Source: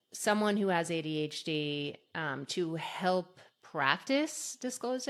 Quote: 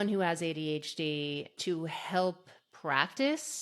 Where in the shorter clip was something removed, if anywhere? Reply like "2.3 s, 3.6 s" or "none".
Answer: 1.5 s